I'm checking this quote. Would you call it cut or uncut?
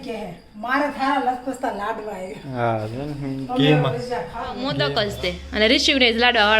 cut